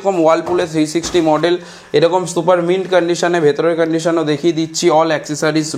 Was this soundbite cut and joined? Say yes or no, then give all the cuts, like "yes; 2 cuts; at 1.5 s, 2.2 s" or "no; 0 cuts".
no; 0 cuts